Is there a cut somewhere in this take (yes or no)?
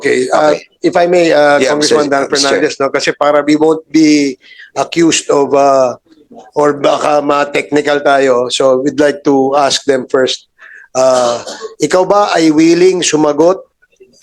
no